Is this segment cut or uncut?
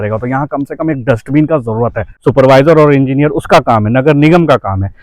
cut